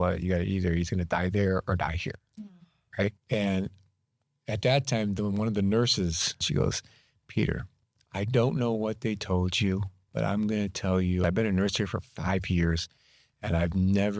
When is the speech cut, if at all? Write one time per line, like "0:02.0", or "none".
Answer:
0:03.2
0:06.4
0:11.2